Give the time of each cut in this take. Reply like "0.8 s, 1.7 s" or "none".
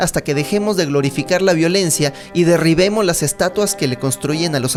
none